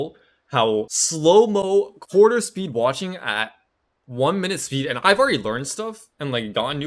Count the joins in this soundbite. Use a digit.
1